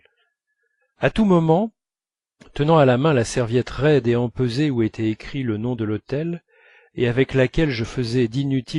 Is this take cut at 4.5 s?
no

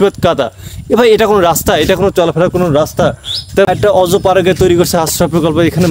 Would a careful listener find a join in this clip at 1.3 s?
no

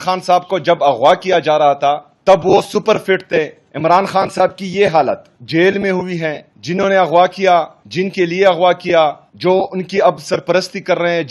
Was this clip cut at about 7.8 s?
yes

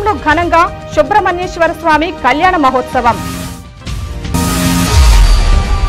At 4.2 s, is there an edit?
yes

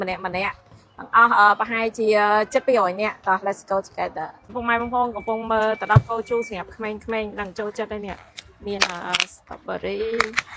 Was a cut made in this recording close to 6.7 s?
no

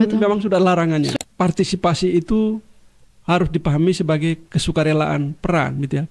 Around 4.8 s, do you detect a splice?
no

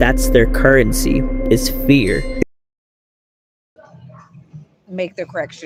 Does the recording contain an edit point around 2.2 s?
no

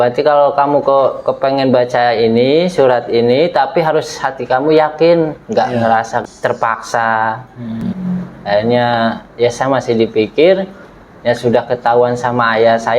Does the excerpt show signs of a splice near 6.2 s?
yes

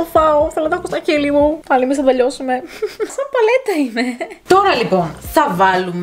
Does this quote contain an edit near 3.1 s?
no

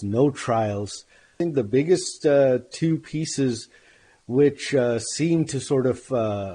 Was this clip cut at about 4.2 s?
no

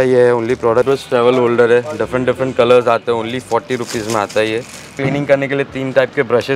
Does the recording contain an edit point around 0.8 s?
yes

